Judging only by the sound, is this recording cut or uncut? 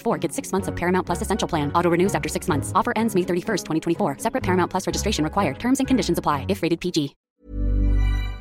cut